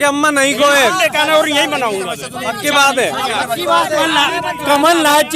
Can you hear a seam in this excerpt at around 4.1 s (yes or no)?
yes